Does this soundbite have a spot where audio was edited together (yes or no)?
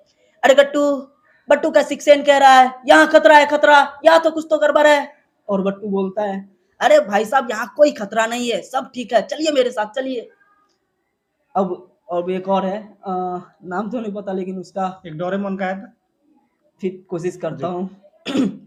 no